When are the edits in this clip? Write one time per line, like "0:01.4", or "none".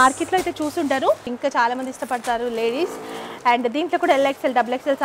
0:01.3